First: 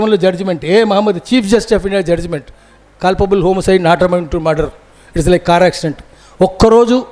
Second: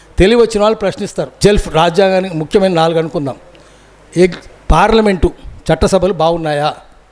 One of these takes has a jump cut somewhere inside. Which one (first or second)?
second